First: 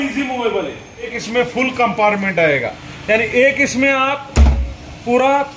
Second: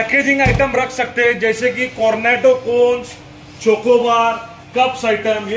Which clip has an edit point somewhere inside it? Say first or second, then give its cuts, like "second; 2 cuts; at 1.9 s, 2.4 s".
first; 1 cut; at 1.2 s